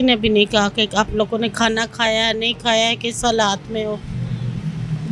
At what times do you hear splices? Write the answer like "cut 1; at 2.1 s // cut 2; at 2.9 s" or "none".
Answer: none